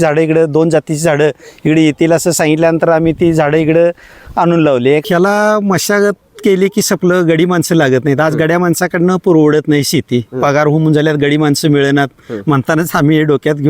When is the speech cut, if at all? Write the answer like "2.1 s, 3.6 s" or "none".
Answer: 5.0 s